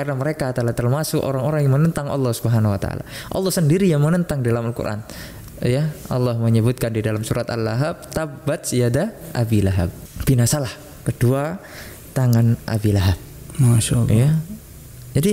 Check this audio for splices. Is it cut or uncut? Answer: uncut